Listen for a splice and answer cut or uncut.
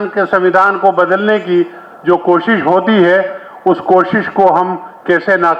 uncut